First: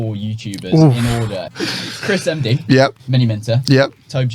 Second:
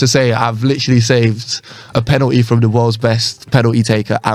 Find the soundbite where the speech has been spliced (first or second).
first